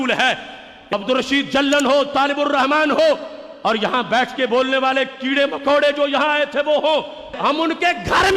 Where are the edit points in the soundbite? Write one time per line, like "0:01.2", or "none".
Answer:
0:00.9